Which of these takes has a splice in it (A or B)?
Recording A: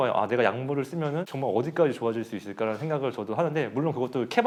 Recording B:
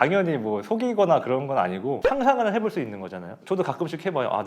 B